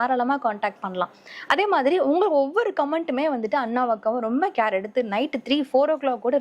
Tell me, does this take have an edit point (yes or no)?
no